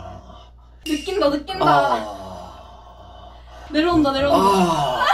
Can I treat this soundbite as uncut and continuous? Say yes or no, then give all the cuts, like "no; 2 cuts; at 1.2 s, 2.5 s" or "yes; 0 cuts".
yes; 0 cuts